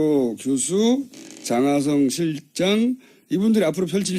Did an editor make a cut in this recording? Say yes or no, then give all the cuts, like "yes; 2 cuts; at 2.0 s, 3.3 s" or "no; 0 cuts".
yes; 1 cut; at 3.2 s